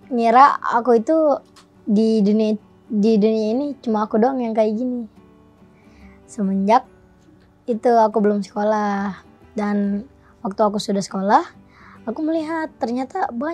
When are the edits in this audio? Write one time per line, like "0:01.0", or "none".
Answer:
none